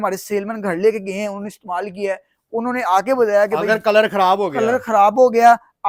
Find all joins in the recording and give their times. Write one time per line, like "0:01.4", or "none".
none